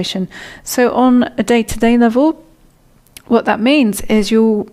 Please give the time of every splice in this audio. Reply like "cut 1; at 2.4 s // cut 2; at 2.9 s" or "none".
none